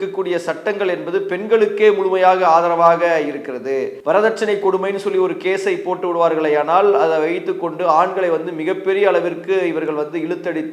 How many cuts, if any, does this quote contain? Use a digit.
1